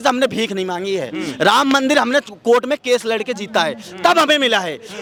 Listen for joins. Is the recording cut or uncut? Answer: uncut